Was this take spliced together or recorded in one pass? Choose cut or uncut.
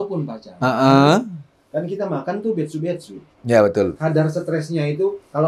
cut